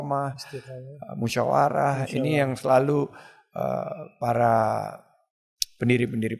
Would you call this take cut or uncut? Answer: uncut